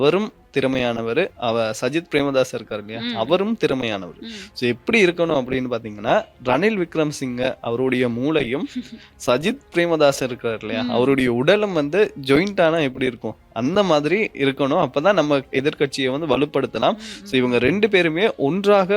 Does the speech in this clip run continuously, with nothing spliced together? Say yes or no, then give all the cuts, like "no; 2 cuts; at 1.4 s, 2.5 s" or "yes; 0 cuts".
yes; 0 cuts